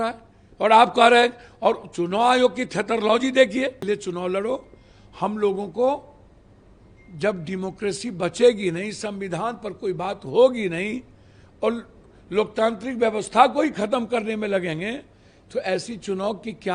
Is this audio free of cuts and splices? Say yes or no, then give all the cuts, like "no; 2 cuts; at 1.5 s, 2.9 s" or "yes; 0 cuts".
no; 1 cut; at 3.8 s